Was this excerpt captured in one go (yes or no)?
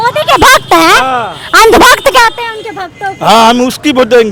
yes